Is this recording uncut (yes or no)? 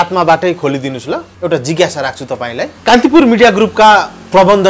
no